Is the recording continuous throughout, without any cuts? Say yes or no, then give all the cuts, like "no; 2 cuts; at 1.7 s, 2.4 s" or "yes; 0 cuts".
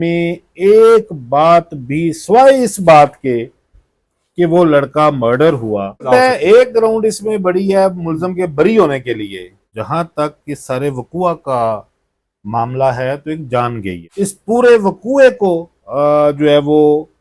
no; 3 cuts; at 6.1 s, 9.7 s, 14.0 s